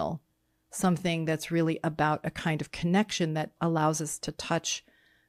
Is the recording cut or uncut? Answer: uncut